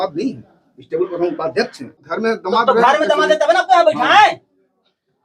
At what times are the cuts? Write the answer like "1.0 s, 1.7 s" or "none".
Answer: 2.0 s